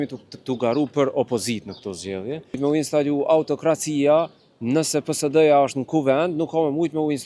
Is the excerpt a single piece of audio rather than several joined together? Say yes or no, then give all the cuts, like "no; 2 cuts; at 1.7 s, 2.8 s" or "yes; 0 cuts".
no; 1 cut; at 2.4 s